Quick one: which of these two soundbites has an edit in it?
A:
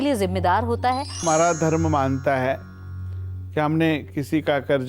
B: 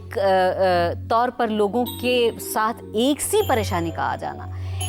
A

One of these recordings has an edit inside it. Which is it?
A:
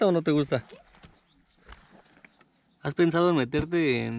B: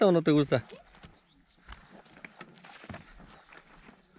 A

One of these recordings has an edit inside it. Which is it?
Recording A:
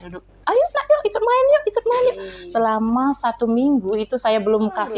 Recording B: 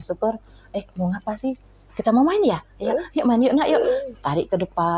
A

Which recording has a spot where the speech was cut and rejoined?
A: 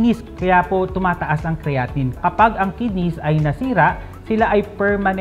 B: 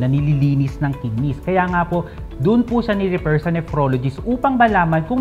A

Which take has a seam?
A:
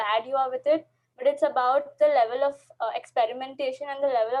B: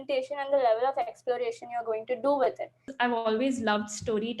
B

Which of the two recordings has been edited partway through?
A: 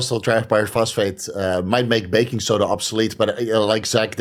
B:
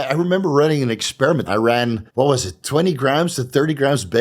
B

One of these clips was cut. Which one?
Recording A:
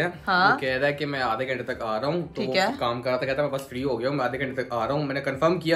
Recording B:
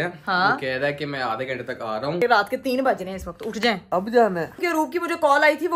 B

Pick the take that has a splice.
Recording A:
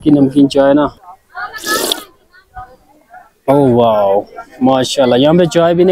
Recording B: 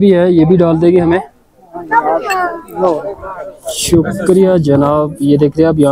A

